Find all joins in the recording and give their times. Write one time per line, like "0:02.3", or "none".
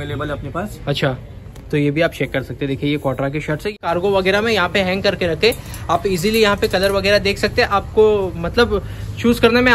0:03.8